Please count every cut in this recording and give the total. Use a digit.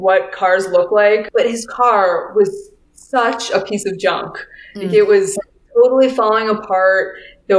1